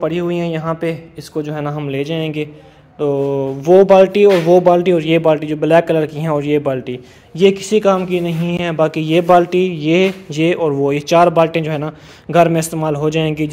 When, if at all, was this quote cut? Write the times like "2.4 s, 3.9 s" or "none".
none